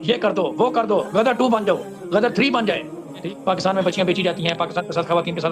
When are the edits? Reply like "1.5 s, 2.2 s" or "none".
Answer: 3.2 s